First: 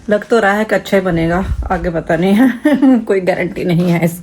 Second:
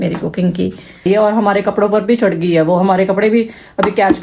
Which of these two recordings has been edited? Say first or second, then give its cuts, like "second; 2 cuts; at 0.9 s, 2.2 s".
second; 1 cut; at 1.0 s